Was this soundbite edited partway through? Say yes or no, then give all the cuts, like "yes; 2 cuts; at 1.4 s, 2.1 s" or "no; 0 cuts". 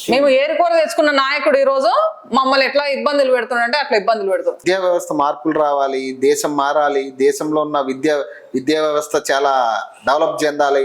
yes; 1 cut; at 4.6 s